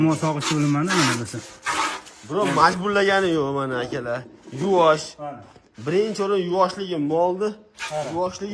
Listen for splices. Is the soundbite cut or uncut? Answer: uncut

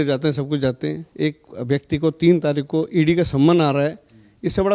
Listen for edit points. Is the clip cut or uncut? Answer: uncut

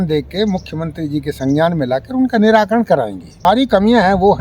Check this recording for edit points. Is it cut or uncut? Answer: cut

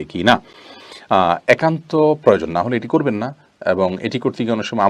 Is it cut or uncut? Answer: uncut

